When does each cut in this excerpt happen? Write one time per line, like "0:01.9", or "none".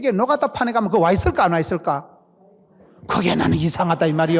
none